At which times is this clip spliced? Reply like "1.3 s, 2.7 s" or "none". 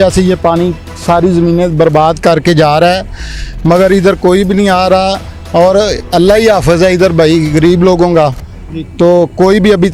none